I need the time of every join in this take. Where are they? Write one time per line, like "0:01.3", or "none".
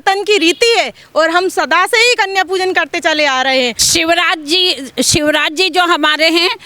0:03.8